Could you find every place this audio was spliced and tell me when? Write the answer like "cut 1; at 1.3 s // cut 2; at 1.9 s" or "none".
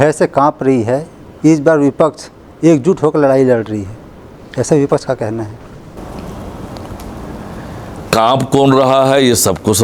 none